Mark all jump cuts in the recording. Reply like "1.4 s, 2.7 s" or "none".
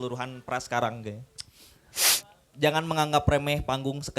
2.0 s